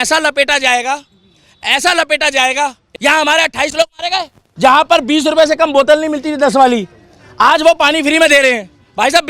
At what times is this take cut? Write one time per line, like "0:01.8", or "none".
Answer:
0:02.9
0:04.4